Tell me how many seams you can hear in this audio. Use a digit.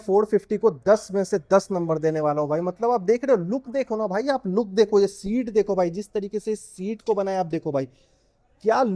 0